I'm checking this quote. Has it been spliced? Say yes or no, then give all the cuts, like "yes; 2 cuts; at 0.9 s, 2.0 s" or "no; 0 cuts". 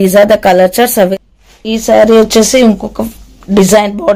yes; 1 cut; at 1.1 s